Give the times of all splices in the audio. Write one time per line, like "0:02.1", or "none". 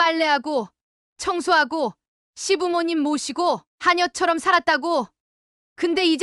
none